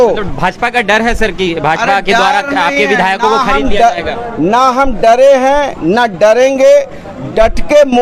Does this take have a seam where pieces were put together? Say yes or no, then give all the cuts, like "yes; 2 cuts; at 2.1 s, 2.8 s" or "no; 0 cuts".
no; 0 cuts